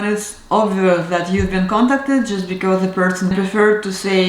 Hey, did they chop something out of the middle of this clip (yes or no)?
yes